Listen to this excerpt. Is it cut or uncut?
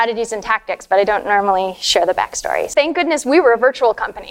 cut